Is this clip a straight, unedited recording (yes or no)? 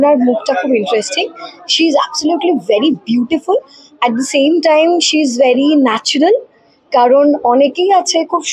yes